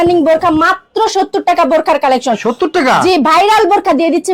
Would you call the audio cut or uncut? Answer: uncut